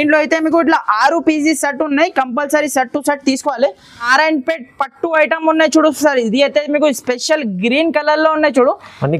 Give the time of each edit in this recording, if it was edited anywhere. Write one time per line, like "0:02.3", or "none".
0:04.1